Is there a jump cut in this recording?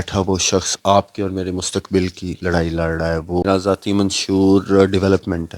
yes; 1 cut; at 3.4 s

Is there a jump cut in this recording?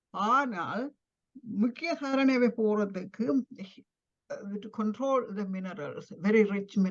no; 0 cuts

